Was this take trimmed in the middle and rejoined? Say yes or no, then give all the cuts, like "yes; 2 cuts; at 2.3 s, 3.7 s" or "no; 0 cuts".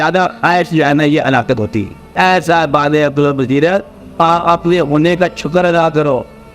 yes; 1 cut; at 2.1 s